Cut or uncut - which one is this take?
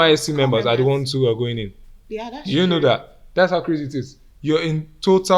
uncut